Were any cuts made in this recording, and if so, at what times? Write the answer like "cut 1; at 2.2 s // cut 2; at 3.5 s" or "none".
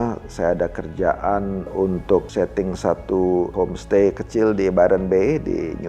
cut 1; at 1.9 s // cut 2; at 3.5 s